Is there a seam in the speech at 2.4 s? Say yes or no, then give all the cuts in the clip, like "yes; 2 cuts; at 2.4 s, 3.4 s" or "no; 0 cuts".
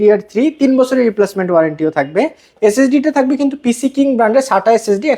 no; 0 cuts